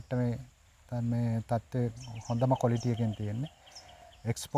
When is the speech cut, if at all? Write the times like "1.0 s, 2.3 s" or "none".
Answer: none

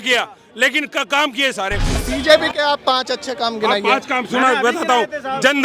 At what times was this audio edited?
2.0 s

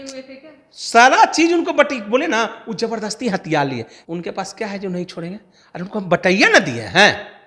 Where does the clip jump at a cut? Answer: 4.0 s

